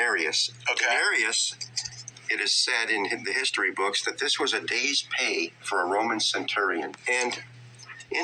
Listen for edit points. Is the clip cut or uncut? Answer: cut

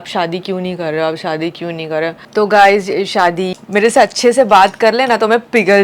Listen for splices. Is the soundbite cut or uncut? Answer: cut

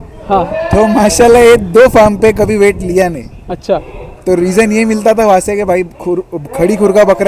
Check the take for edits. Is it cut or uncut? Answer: uncut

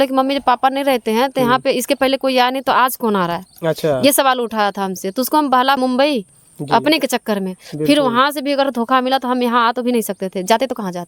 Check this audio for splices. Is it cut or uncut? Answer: cut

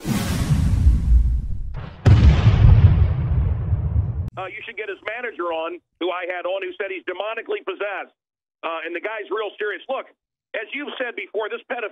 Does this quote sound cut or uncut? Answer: cut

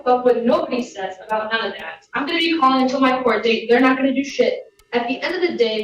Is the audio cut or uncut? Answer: uncut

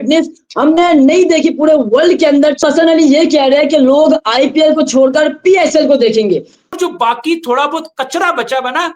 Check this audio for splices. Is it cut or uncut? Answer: cut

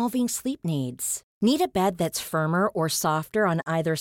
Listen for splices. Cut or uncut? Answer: uncut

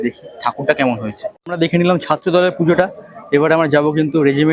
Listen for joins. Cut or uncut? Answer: cut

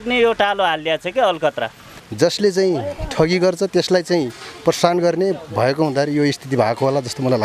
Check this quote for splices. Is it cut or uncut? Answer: cut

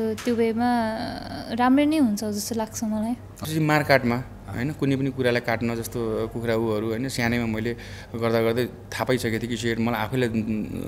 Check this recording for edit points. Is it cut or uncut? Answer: cut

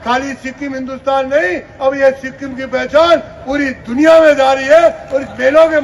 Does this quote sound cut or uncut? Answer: uncut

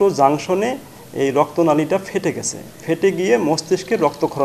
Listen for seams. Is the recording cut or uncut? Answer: uncut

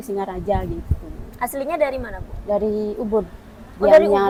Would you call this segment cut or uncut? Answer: uncut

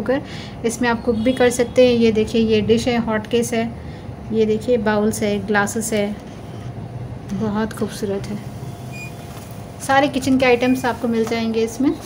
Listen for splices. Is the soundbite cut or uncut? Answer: uncut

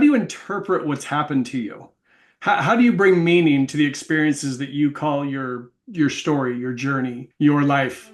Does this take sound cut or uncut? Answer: cut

